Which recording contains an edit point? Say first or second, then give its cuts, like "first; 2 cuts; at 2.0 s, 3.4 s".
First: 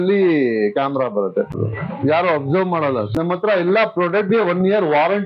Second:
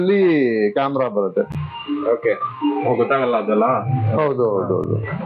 first; 2 cuts; at 1.6 s, 3.1 s